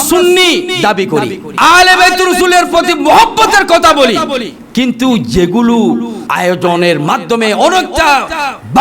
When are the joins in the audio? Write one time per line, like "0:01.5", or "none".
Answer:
0:01.4
0:06.2